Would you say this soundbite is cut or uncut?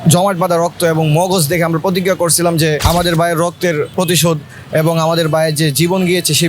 cut